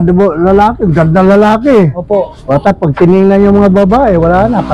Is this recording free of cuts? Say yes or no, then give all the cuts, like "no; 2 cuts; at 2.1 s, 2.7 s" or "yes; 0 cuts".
yes; 0 cuts